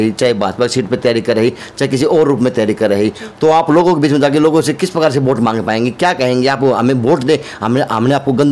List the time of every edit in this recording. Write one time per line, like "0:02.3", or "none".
none